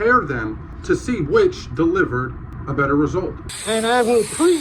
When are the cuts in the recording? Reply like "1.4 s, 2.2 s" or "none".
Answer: 3.4 s

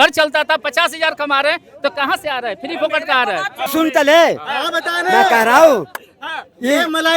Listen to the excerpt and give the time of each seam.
3.7 s

